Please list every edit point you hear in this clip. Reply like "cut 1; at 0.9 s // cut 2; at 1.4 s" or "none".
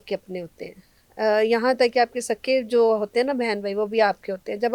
none